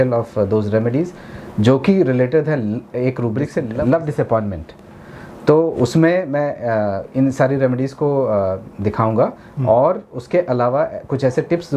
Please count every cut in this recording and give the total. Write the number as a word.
one